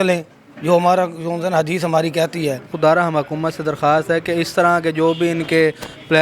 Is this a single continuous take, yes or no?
no